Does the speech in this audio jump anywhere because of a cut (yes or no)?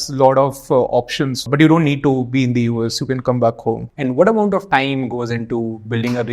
yes